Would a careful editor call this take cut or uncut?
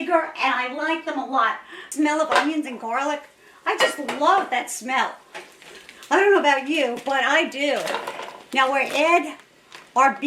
cut